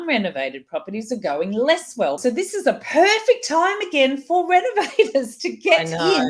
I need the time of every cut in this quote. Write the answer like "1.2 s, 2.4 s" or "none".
2.2 s

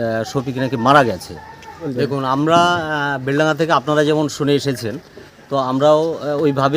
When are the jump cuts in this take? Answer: 1.9 s

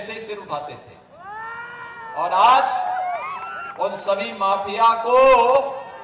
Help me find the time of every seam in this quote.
none

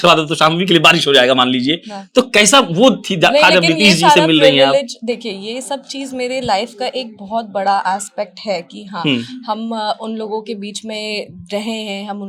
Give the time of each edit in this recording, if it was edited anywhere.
none

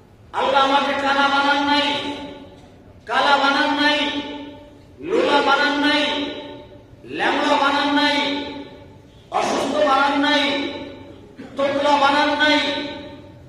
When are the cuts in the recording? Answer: none

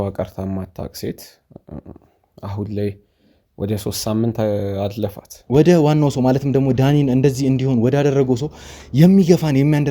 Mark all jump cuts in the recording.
5.3 s

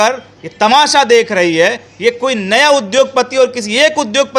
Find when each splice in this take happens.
none

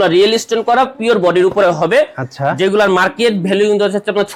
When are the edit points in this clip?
none

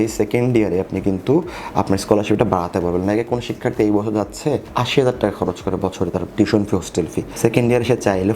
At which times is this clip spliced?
4.7 s, 7.2 s

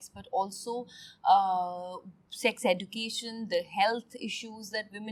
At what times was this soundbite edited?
none

